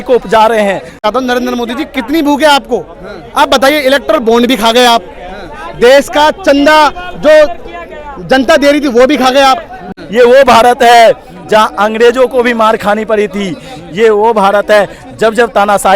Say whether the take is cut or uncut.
cut